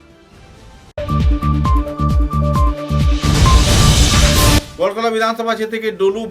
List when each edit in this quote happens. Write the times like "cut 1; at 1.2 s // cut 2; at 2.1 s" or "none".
cut 1; at 4.7 s